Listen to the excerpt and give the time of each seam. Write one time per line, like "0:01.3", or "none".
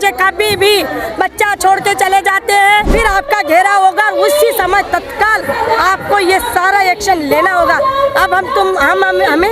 0:02.9